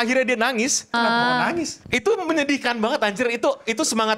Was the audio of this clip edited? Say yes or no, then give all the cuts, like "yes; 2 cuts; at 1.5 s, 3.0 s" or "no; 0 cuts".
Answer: yes; 2 cuts; at 0.9 s, 1.8 s